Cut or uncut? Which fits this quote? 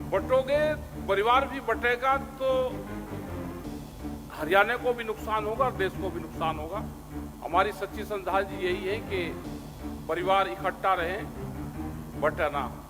uncut